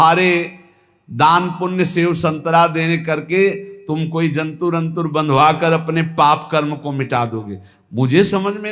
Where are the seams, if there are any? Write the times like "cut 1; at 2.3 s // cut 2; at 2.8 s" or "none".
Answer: none